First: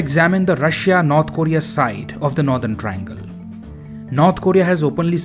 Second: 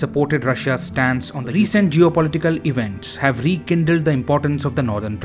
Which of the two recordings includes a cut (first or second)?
second